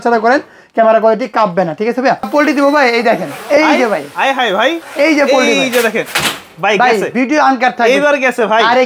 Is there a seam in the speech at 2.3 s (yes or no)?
yes